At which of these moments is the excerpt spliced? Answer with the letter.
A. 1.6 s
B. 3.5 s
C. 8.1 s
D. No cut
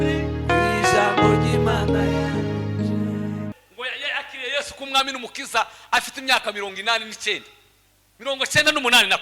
B